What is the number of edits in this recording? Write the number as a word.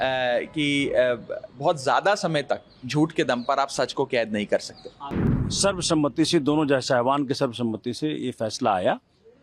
one